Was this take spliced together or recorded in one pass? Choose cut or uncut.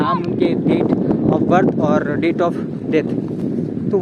uncut